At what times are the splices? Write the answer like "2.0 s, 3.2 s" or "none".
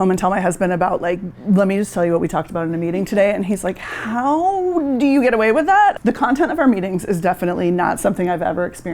6.0 s

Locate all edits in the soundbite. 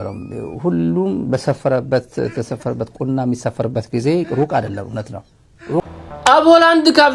5.8 s

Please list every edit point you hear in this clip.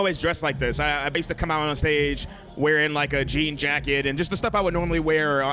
1.1 s

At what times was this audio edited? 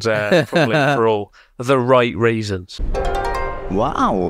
2.7 s

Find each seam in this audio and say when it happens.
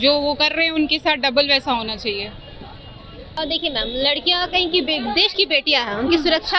none

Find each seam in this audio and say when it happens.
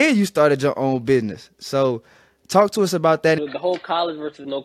3.4 s

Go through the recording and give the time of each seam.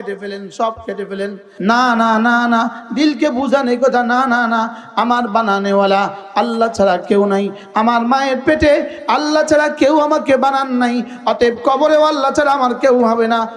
1.4 s

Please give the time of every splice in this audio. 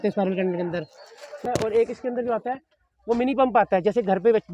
1.4 s

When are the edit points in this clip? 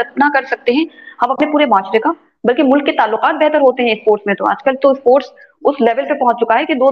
none

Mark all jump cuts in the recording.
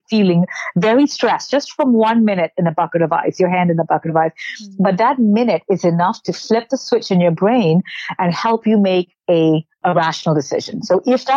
9.8 s

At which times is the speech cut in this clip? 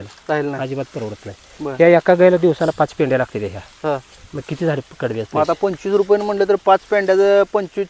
none

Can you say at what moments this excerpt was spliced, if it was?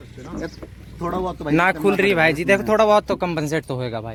none

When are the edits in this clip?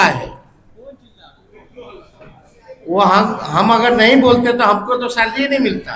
none

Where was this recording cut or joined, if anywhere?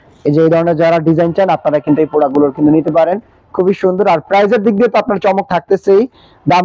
none

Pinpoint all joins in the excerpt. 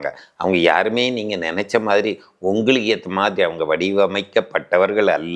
none

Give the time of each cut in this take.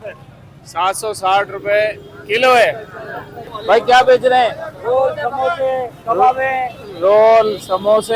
3.5 s

